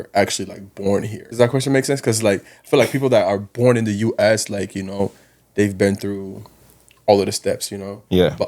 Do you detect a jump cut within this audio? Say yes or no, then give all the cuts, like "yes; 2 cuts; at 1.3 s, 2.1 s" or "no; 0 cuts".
yes; 1 cut; at 1.2 s